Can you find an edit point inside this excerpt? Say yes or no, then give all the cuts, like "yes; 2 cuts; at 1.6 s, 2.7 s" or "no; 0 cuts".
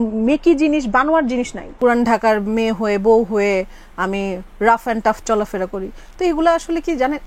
yes; 1 cut; at 1.7 s